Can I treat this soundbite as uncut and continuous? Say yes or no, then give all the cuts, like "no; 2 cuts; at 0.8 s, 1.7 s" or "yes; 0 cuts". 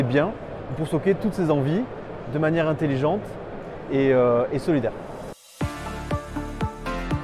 no; 1 cut; at 5.4 s